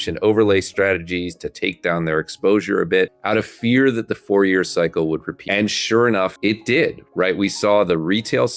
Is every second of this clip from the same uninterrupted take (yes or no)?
no